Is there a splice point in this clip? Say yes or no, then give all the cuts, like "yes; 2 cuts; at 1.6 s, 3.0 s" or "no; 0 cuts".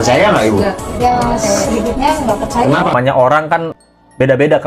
yes; 1 cut; at 2.9 s